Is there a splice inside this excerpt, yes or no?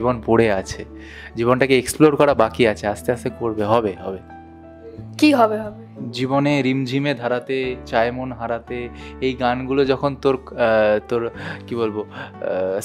no